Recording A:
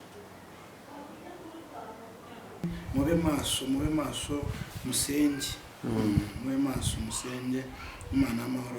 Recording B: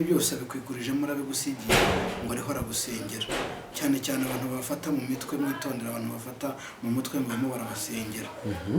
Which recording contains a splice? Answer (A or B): A